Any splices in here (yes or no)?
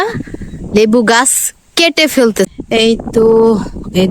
yes